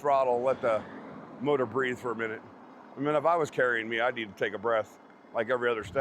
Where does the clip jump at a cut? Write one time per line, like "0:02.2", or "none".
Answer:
none